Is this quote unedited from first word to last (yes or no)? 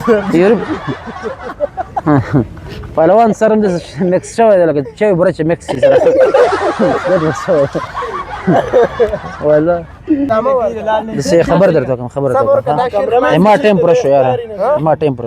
no